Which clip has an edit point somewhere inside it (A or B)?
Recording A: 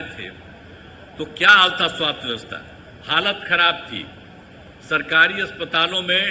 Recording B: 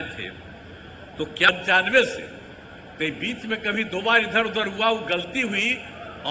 B